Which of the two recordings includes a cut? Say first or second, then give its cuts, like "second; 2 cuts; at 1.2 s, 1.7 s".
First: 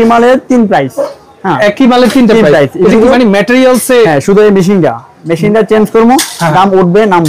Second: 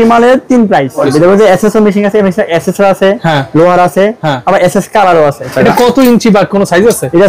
second; 2 cuts; at 1.1 s, 5.5 s